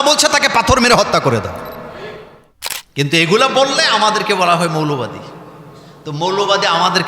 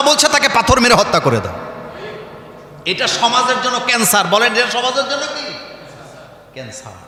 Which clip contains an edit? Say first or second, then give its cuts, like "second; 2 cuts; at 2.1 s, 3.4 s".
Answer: first; 1 cut; at 2.4 s